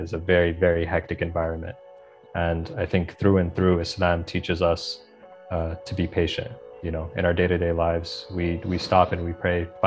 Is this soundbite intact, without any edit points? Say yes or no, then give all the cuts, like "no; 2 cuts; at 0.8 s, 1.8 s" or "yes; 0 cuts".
yes; 0 cuts